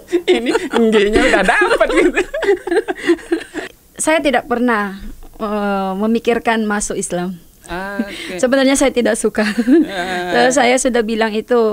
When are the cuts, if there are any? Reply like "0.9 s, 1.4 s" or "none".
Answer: 3.7 s